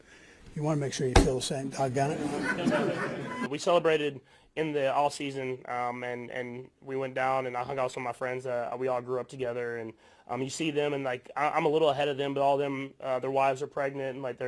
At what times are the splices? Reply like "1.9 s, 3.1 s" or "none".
3.6 s

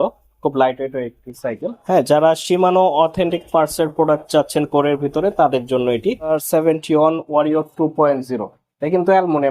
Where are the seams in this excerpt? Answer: 1.8 s, 6.3 s

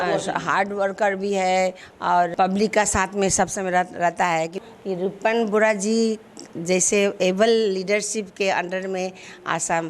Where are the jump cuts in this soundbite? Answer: 2.3 s, 4.6 s

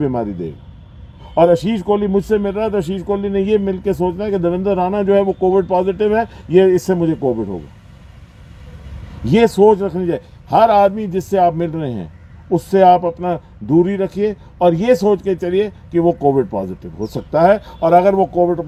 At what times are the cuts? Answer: none

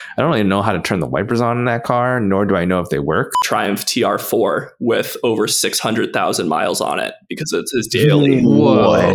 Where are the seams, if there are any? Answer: 3.4 s

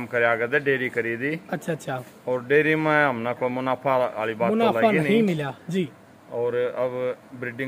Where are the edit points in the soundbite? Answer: none

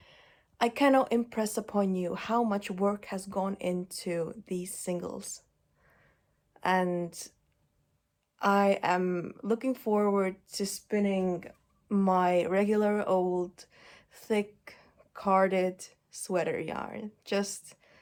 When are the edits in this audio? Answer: none

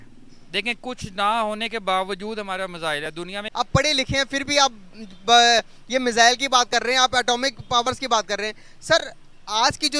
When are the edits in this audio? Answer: 3.5 s

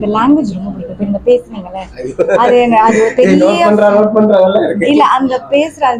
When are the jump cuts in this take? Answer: none

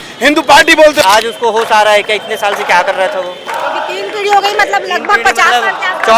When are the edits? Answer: 1.0 s

